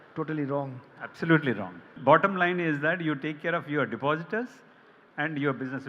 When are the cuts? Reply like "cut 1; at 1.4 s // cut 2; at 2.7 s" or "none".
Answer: cut 1; at 1.9 s